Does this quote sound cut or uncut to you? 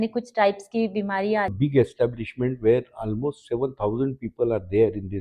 cut